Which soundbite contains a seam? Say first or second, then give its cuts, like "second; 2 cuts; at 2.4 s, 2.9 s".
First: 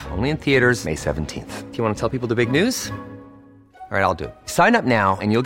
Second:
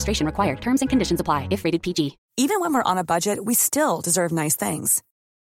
second; 1 cut; at 2.2 s